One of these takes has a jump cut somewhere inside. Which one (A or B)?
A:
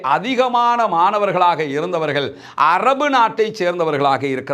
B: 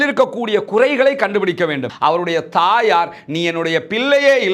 B